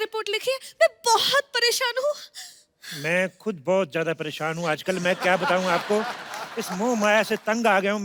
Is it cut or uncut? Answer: uncut